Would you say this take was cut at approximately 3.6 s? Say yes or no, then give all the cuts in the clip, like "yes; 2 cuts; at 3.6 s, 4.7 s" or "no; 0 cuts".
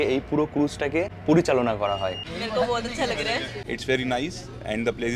yes; 3 cuts; at 1.1 s, 2.3 s, 3.6 s